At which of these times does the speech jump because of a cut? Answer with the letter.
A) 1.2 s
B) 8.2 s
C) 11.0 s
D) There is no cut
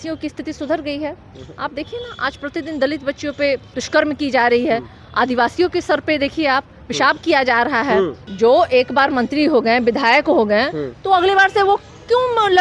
B